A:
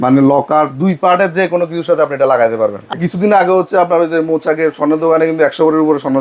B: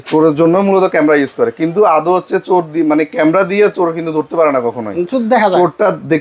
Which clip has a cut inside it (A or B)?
A